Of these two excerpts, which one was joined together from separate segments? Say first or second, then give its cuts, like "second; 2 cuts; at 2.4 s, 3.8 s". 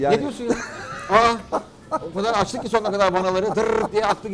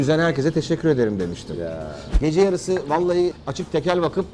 second; 2 cuts; at 2.0 s, 3.4 s